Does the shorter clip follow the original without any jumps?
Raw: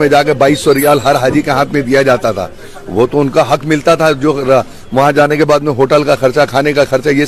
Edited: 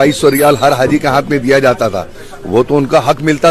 yes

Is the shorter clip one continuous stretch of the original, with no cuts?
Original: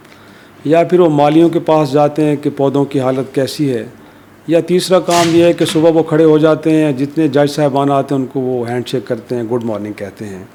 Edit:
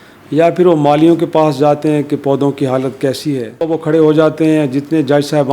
no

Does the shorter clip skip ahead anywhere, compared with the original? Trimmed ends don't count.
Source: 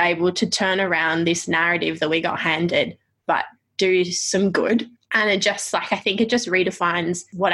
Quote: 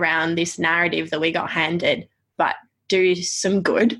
no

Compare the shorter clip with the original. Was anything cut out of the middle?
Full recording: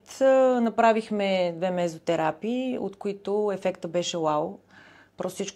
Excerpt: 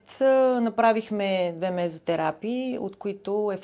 no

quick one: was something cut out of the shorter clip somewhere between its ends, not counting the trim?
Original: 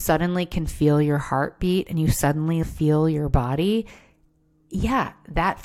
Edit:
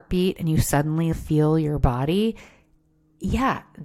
no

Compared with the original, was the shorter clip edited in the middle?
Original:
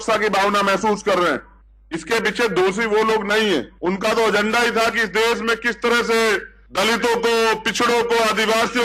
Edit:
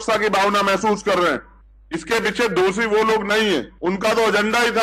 no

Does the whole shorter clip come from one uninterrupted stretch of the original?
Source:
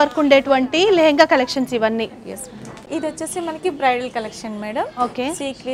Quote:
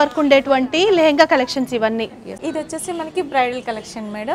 no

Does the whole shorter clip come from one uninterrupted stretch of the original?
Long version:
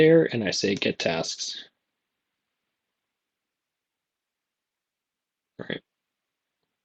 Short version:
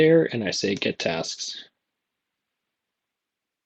yes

